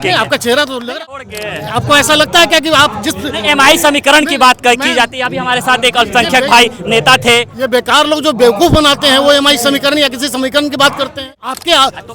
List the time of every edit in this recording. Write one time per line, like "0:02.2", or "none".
0:01.0
0:11.2